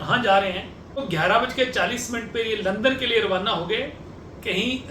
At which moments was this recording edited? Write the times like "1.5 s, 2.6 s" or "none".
1.1 s